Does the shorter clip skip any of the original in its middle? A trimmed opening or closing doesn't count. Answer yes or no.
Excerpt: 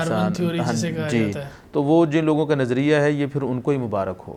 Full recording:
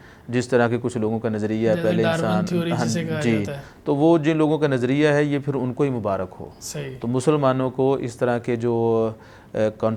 no